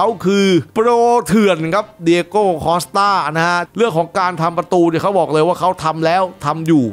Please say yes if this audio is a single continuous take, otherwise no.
no